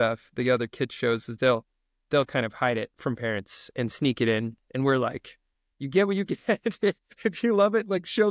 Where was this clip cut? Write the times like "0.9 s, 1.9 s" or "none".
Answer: none